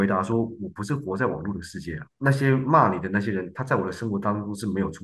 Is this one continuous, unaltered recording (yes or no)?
yes